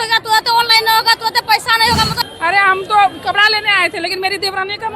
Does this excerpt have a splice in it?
yes; 1 cut; at 2.2 s

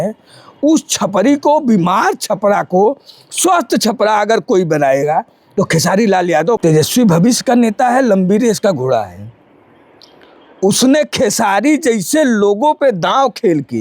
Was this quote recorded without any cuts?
no; 1 cut; at 6.6 s

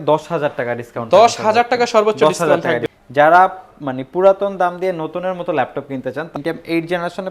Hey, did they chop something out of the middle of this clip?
yes; 2 cuts; at 2.9 s, 6.4 s

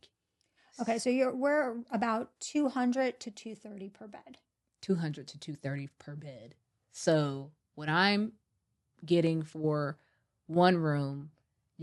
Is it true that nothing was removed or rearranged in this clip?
yes; 0 cuts

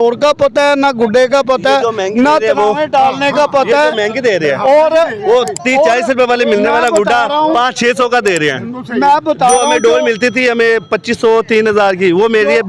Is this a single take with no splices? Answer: yes; 0 cuts

